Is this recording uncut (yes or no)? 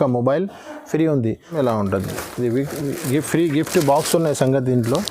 no